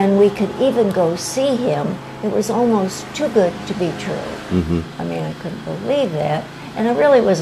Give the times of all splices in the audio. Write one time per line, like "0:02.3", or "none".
none

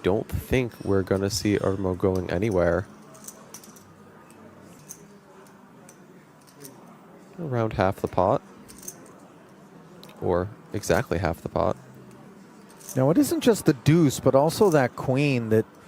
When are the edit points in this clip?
0:04.8

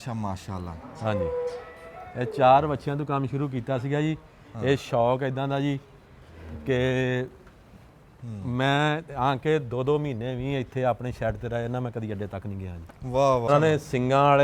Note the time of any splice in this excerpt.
0:13.5

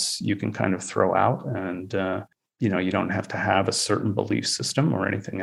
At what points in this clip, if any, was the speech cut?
none

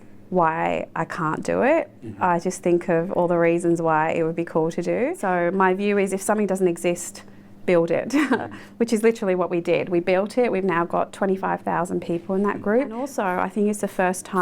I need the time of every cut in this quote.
0:05.2
0:13.1

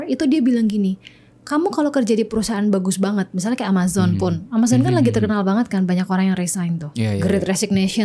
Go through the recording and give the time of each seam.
none

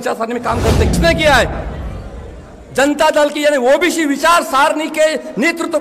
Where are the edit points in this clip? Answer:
0:00.9

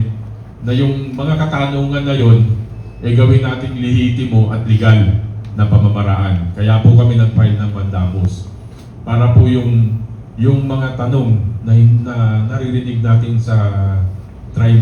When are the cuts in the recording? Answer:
none

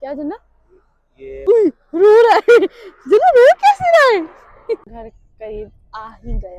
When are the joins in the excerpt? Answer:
0:01.4
0:04.9

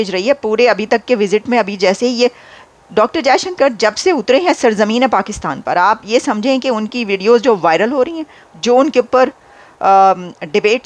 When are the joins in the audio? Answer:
none

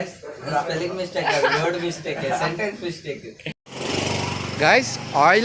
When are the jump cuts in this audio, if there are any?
0:03.7

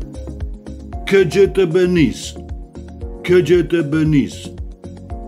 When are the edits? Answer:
0:01.1
0:04.3

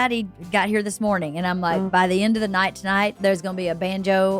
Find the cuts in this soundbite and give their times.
0:01.9
0:03.2

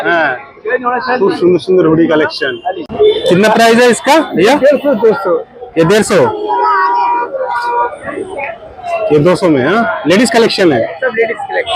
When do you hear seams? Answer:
0:02.8

